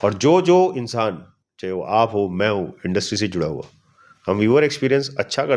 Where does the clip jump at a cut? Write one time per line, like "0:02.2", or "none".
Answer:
none